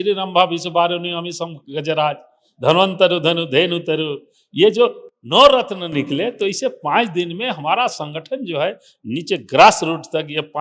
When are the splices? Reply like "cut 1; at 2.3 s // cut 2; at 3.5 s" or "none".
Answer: none